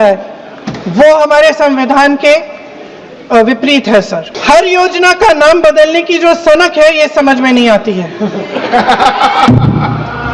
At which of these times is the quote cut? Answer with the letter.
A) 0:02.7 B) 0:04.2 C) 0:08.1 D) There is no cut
B